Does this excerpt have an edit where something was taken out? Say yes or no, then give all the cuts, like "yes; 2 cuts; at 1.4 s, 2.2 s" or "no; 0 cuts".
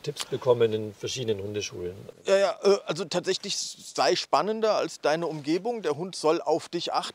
no; 0 cuts